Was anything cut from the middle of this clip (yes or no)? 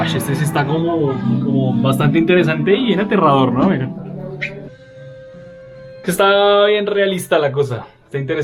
yes